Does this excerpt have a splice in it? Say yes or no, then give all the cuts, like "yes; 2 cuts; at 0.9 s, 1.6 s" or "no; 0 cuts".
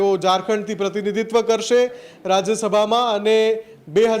no; 0 cuts